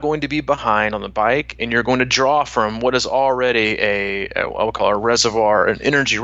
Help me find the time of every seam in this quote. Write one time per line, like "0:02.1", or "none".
none